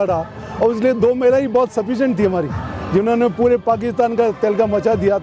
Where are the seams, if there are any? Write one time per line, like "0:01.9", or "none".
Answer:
none